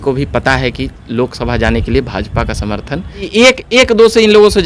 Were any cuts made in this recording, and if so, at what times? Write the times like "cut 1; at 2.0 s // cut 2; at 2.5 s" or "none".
cut 1; at 3.3 s